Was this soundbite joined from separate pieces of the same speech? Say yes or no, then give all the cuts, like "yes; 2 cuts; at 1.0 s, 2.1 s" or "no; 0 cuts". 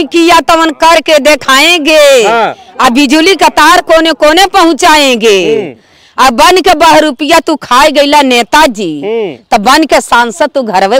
no; 0 cuts